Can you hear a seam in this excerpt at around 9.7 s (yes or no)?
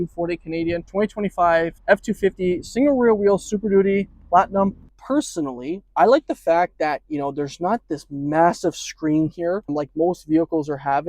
yes